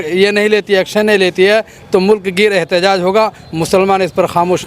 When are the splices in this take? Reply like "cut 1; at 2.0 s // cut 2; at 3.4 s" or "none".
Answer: none